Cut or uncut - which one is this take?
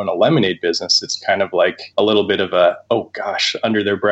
cut